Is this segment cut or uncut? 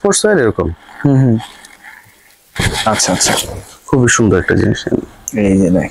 uncut